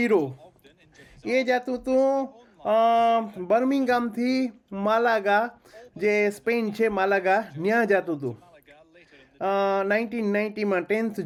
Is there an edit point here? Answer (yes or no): no